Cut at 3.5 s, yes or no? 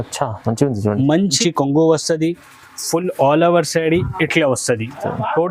no